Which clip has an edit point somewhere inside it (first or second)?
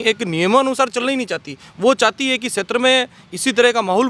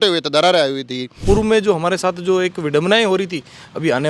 second